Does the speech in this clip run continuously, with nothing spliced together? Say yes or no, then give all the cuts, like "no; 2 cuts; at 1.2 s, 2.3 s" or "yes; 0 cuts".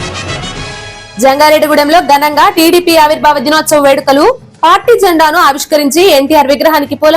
no; 1 cut; at 1.0 s